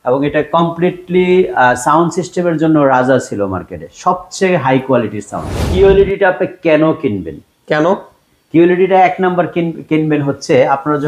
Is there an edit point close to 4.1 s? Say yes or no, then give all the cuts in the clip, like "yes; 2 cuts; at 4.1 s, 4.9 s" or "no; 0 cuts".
no; 1 cut; at 5.6 s